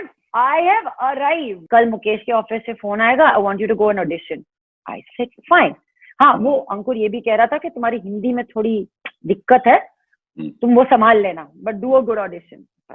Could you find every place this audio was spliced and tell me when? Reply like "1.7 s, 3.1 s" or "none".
1.5 s